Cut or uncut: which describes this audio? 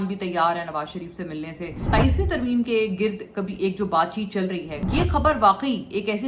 cut